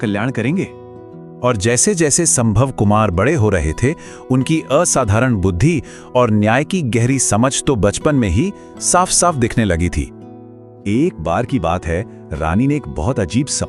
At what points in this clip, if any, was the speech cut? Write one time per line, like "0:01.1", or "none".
none